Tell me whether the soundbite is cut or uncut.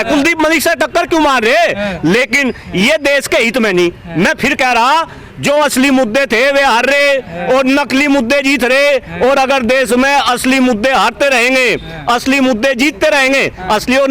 uncut